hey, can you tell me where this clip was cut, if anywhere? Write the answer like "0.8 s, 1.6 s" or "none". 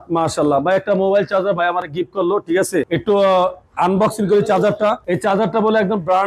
none